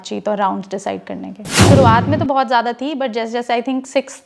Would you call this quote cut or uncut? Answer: cut